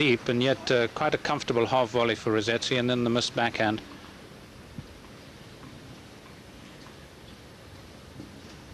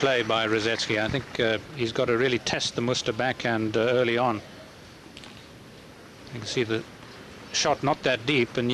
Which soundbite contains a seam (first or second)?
second